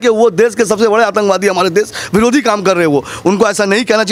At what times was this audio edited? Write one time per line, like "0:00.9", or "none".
none